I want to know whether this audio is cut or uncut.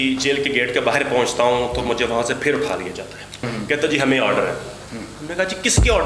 cut